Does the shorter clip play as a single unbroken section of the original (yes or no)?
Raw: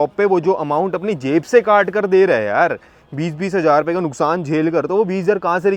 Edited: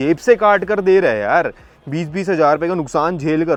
yes